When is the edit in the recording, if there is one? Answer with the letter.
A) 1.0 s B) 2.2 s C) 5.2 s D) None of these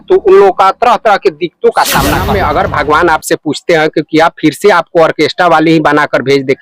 B